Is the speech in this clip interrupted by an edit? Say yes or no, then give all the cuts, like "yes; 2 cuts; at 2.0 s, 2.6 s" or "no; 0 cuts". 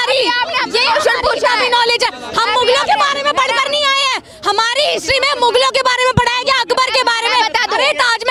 no; 0 cuts